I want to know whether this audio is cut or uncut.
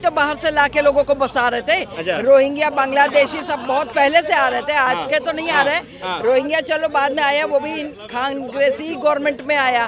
uncut